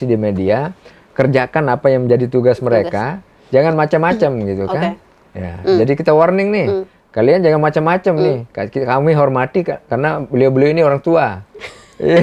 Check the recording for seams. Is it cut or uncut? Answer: uncut